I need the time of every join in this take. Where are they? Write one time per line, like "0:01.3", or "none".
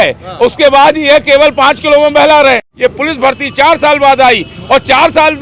0:02.7